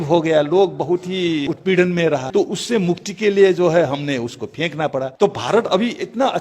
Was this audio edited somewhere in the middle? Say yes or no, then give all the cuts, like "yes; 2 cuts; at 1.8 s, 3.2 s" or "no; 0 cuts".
yes; 3 cuts; at 1.4 s, 2.3 s, 5.1 s